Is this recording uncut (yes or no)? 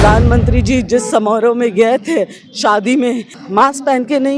no